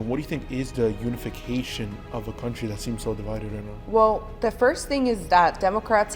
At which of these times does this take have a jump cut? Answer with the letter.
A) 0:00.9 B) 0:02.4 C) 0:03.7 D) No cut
D